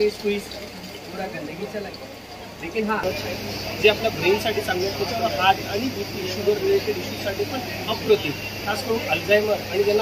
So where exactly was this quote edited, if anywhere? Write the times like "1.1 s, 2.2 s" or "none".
3.0 s

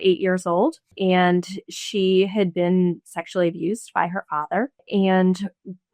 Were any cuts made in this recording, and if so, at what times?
0.9 s, 4.8 s

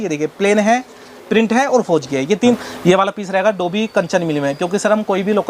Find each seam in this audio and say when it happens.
2.6 s

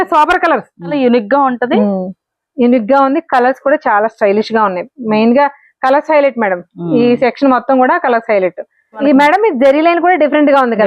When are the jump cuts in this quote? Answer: 0.9 s, 9.0 s

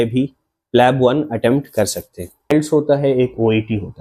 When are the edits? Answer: 2.5 s

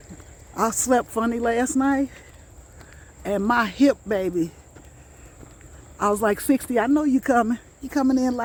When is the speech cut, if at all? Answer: none

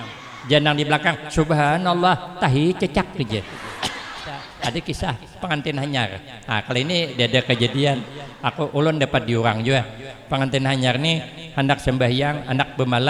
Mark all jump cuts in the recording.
4.5 s

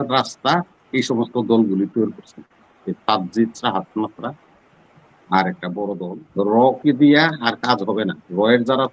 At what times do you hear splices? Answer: 6.1 s

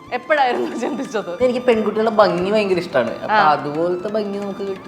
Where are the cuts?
1.3 s

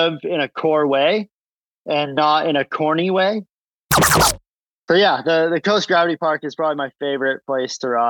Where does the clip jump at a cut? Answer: 4.1 s

